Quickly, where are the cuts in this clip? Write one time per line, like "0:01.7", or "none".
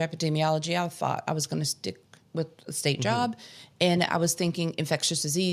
none